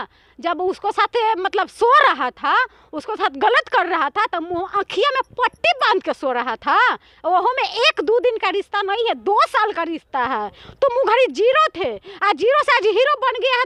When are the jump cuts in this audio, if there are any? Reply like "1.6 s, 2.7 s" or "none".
none